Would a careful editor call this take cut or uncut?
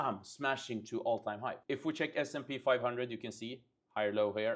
cut